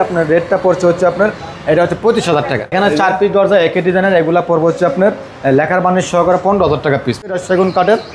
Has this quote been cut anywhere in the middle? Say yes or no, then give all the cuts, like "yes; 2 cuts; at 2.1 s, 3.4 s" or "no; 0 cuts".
yes; 2 cuts; at 2.7 s, 7.3 s